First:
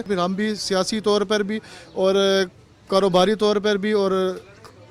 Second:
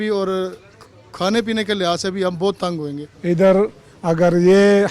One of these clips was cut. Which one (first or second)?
second